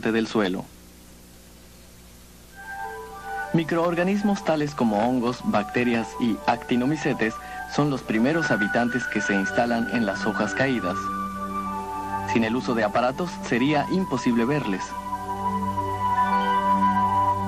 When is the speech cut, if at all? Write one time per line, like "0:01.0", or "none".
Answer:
none